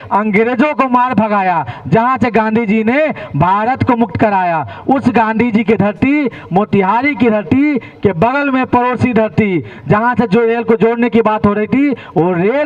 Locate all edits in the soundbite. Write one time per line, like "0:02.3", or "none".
none